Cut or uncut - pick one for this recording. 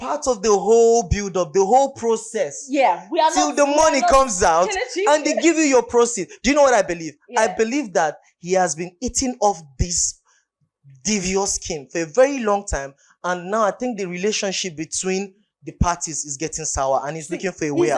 uncut